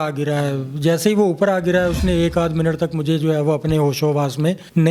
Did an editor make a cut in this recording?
no; 0 cuts

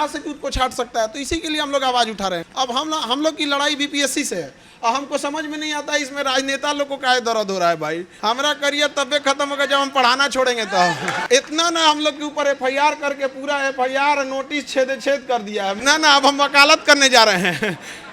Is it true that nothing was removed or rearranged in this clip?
no; 4 cuts; at 2.5 s, 8.1 s, 11.1 s, 15.8 s

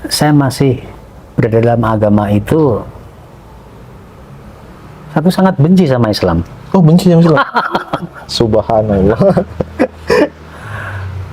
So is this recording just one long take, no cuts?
yes; 0 cuts

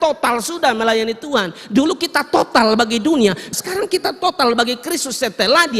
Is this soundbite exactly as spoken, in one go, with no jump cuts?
no; 1 cut; at 3.5 s

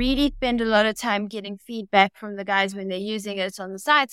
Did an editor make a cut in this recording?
no; 0 cuts

